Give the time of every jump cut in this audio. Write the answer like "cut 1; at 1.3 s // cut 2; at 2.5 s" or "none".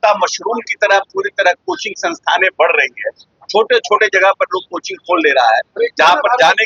none